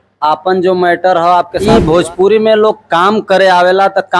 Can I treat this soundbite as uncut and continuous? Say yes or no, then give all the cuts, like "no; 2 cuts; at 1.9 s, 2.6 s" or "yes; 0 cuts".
no; 1 cut; at 1.7 s